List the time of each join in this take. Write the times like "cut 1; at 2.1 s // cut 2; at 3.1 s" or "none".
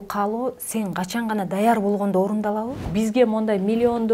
cut 1; at 2.7 s